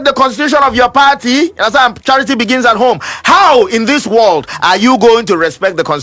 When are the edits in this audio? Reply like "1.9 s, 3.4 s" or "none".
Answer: none